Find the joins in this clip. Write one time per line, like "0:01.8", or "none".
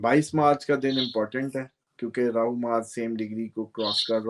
none